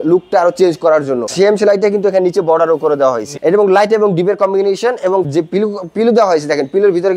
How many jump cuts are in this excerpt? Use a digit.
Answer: 2